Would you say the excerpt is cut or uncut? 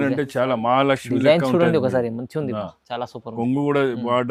uncut